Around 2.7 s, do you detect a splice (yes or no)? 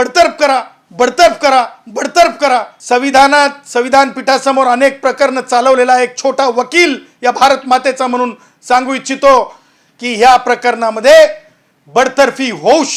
yes